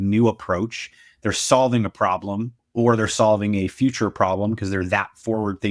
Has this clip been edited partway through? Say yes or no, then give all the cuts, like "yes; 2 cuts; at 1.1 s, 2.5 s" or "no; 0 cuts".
no; 0 cuts